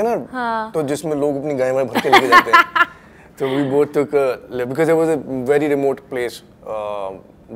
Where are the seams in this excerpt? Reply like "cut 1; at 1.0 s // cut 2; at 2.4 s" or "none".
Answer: none